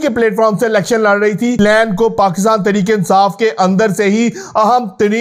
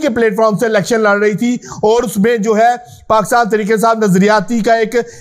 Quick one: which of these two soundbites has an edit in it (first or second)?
first